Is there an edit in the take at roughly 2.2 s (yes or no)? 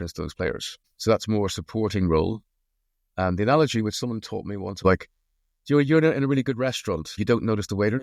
no